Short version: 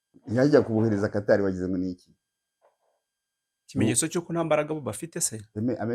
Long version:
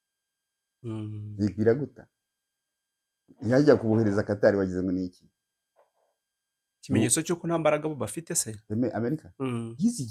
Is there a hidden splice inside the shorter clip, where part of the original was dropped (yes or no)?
no